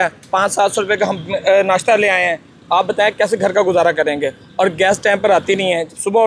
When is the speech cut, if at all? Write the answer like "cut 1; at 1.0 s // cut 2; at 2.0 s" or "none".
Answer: none

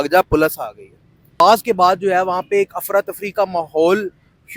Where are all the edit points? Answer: cut 1; at 1.4 s

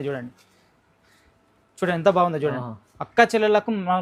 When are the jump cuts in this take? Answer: none

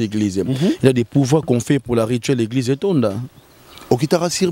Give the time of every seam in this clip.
none

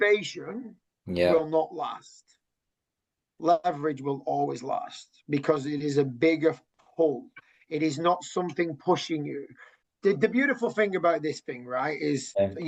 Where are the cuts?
cut 1; at 9.8 s

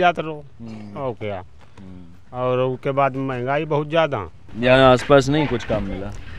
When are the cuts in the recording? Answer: cut 1; at 4.4 s

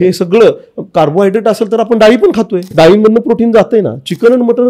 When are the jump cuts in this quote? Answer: cut 1; at 2.6 s

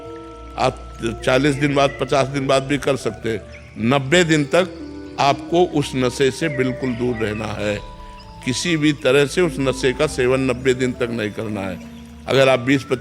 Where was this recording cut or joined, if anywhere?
none

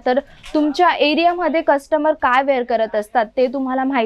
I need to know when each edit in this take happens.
none

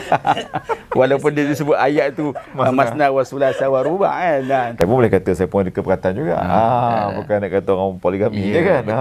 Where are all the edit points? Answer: cut 1; at 4.8 s

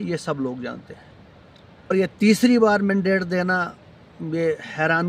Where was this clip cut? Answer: cut 1; at 1.9 s

